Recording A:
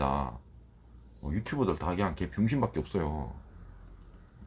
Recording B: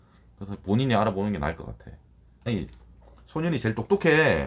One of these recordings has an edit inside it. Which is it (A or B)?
B